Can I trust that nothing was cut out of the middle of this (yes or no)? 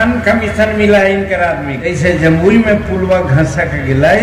no